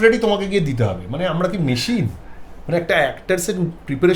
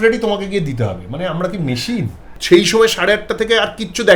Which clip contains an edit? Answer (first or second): second